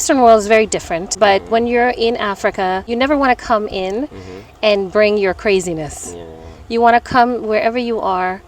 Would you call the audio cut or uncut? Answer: cut